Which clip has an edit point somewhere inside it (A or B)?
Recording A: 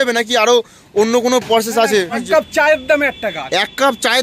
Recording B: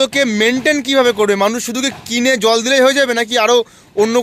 A